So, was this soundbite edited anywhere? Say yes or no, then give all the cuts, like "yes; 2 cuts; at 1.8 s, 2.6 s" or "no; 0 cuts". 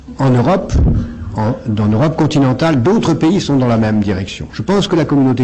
no; 0 cuts